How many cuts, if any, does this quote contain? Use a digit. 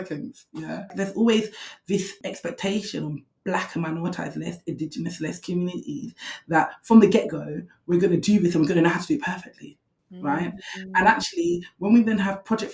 1